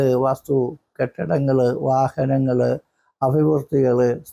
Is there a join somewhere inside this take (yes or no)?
no